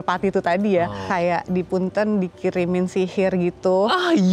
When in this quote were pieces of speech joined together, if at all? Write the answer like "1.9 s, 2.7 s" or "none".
1.0 s